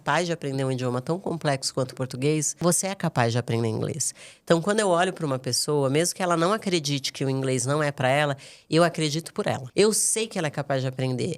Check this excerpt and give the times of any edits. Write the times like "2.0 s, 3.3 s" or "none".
2.5 s, 9.6 s